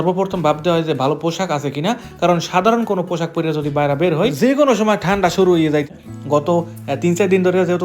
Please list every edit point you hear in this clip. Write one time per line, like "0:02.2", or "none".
0:05.9